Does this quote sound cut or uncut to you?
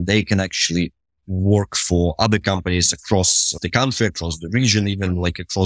cut